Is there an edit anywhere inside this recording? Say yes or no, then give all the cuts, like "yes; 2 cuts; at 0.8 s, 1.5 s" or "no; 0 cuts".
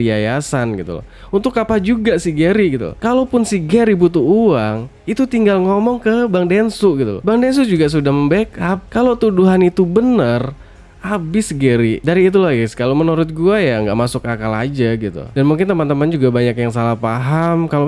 yes; 1 cut; at 15.2 s